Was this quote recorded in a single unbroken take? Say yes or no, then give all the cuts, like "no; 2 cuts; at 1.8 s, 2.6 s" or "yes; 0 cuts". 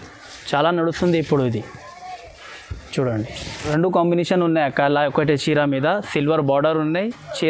no; 1 cut; at 3.6 s